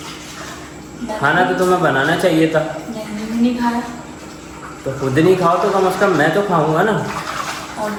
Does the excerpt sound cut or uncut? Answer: uncut